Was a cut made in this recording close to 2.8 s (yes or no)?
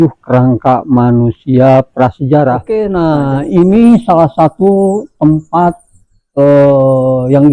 yes